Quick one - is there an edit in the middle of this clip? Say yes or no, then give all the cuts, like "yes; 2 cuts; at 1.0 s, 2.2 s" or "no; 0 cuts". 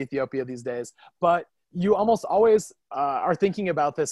yes; 2 cuts; at 1.6 s, 2.8 s